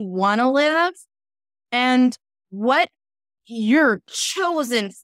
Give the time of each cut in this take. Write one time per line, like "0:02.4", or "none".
none